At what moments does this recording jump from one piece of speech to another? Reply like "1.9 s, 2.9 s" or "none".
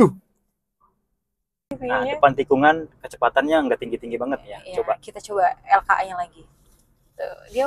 1.7 s